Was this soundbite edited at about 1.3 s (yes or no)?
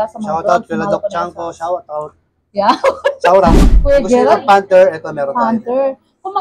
no